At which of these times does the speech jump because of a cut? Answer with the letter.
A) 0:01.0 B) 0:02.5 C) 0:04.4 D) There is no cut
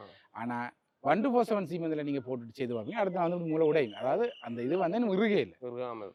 D